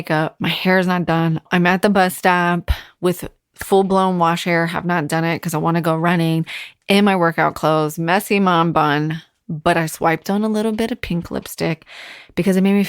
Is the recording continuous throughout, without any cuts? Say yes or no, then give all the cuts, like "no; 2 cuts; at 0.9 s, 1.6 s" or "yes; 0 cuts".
no; 1 cut; at 1.5 s